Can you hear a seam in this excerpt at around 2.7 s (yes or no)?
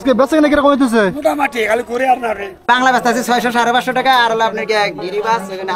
yes